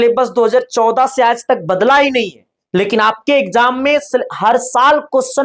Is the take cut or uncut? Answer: uncut